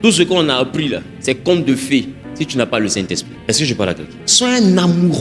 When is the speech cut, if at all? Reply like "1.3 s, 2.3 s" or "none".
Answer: 1.1 s, 2.2 s, 3.3 s, 4.2 s

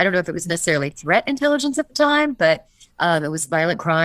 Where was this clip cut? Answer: none

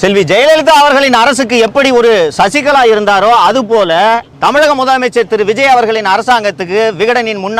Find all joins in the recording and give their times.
4.3 s

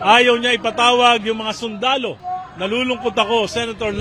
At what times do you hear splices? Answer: 2.2 s

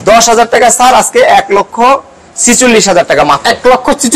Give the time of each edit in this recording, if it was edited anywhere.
none

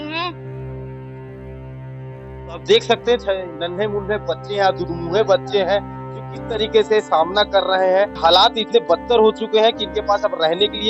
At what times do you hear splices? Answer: 8.1 s

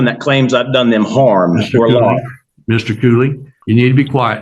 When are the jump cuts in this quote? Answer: 3.5 s

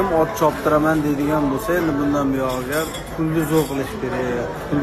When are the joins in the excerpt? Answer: 3.0 s

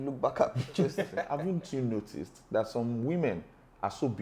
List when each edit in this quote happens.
1.2 s

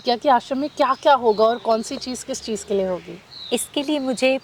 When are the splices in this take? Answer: none

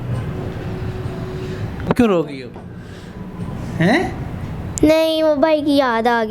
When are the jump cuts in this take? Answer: 1.9 s

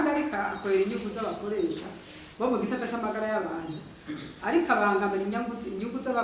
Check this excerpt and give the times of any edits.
none

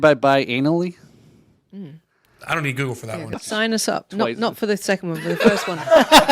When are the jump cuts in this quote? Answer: 3.4 s

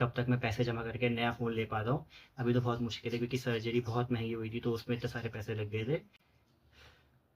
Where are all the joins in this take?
none

